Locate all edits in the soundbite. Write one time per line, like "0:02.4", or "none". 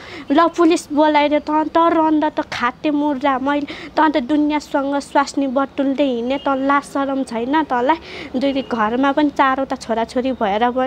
none